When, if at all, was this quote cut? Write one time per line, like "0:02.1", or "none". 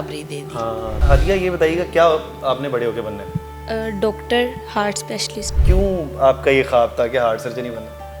0:01.0
0:05.5